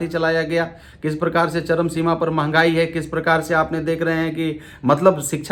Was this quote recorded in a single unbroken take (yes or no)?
yes